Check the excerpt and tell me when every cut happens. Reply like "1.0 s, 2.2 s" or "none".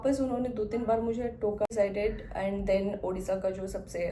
1.7 s